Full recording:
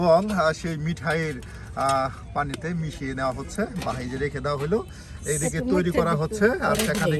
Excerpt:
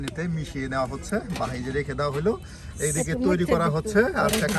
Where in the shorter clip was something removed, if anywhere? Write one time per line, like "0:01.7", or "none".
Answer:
none